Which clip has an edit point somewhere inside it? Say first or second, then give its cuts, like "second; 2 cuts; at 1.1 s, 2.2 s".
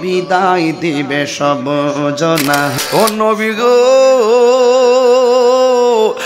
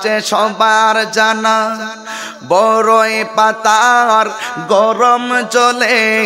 first; 1 cut; at 2.7 s